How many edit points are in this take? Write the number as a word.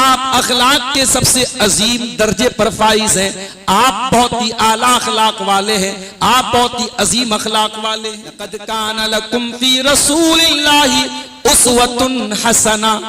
one